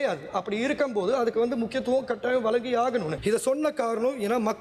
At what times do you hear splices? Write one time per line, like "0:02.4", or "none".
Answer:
0:03.1